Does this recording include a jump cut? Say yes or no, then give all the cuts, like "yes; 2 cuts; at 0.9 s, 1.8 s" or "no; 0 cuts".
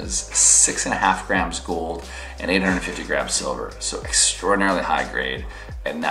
no; 0 cuts